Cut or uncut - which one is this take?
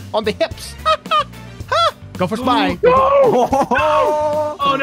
cut